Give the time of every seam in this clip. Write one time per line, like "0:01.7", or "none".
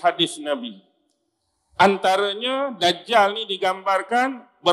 none